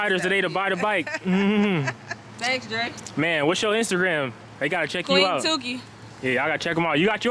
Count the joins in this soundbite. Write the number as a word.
zero